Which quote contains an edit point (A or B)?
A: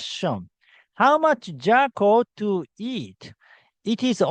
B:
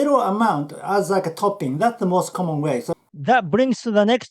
B